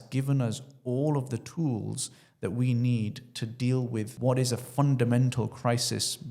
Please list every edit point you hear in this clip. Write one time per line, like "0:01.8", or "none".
0:04.1